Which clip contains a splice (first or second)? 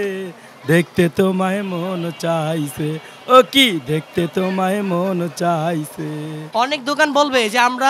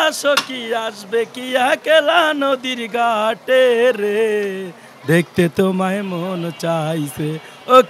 first